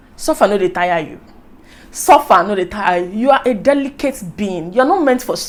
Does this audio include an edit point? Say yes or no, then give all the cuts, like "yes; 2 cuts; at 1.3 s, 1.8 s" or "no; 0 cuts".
no; 0 cuts